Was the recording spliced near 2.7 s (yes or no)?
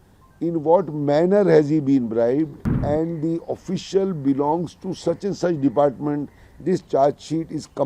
yes